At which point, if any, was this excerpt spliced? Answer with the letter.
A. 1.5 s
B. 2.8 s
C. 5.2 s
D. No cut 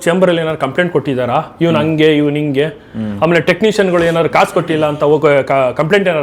D